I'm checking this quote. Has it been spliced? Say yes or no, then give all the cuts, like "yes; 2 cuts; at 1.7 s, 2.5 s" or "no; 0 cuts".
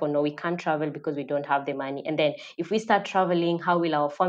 no; 0 cuts